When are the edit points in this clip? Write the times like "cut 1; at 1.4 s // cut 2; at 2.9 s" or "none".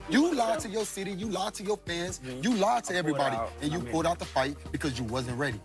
none